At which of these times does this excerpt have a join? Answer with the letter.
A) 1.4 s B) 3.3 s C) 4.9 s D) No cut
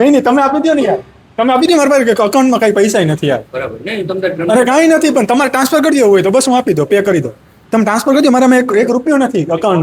D